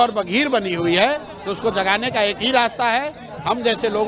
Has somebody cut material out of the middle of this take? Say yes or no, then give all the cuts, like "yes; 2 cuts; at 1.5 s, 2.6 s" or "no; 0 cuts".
no; 0 cuts